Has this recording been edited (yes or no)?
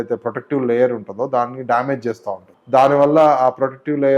yes